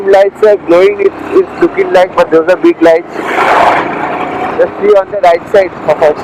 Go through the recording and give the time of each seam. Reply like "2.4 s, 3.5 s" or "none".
none